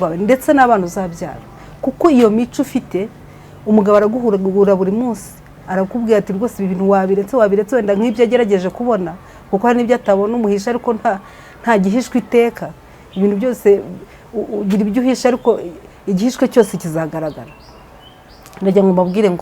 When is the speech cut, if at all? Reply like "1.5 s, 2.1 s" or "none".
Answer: none